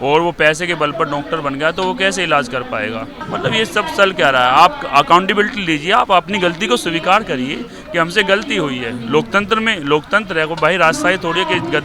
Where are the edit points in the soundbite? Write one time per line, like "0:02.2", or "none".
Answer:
0:03.2